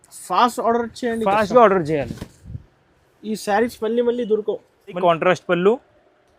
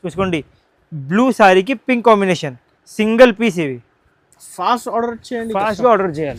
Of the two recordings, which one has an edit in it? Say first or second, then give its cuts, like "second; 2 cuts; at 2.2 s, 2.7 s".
first; 1 cut; at 5.0 s